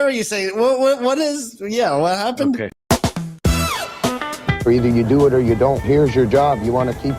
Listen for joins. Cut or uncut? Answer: cut